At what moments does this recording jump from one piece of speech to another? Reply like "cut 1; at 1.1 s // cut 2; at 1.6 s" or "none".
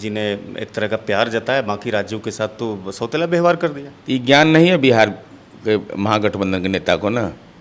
none